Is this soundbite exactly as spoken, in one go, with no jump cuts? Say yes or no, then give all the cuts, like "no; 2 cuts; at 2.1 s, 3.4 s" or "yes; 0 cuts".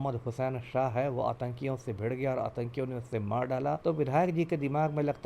no; 1 cut; at 3.8 s